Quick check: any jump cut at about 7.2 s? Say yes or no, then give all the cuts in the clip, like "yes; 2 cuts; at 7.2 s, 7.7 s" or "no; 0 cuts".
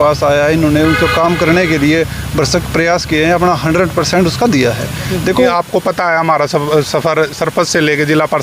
no; 1 cut; at 5.5 s